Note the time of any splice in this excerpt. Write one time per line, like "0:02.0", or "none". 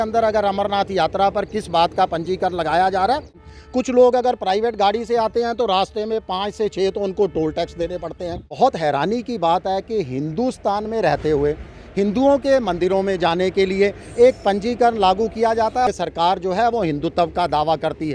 0:03.4
0:08.5
0:15.9